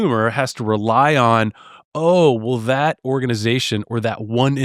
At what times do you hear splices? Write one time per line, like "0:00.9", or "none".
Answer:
none